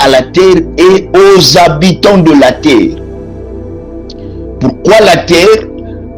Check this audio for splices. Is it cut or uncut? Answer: cut